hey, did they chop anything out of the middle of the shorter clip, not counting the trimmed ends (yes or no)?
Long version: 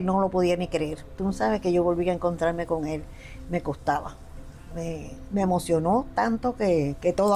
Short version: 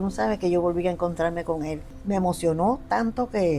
yes